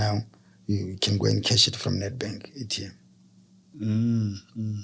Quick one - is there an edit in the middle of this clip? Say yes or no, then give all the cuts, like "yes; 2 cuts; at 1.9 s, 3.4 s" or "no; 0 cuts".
no; 0 cuts